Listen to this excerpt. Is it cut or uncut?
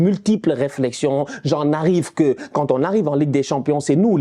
uncut